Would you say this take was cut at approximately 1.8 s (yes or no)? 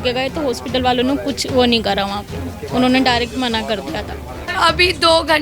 no